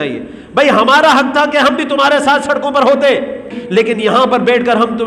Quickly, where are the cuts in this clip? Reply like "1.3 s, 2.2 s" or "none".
3.6 s